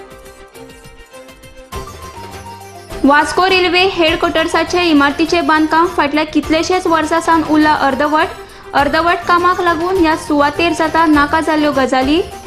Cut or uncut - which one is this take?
uncut